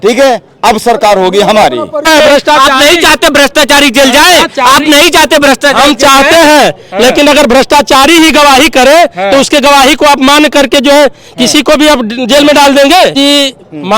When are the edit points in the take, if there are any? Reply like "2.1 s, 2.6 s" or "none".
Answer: 2.1 s, 13.2 s